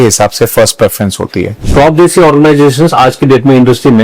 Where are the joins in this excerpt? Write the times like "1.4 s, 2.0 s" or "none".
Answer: 1.6 s